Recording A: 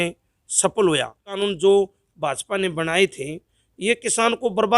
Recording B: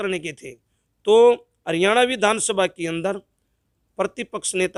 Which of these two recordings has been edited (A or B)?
A